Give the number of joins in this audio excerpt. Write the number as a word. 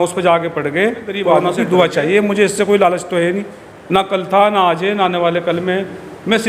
one